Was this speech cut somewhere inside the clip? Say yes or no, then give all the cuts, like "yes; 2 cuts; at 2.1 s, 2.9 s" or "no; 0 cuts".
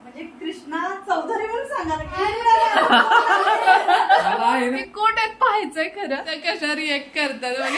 yes; 2 cuts; at 4.9 s, 6.3 s